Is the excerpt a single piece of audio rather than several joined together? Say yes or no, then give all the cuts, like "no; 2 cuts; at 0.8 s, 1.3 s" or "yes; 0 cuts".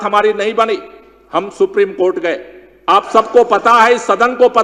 yes; 0 cuts